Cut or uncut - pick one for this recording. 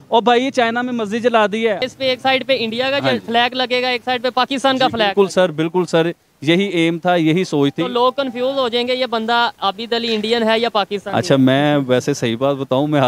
cut